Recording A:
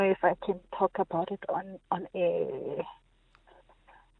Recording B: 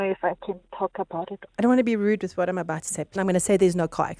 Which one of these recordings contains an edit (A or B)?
B